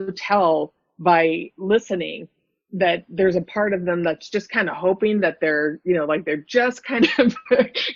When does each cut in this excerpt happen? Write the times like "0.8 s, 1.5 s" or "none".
none